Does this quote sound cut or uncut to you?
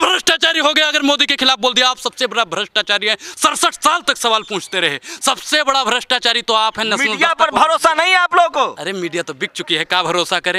uncut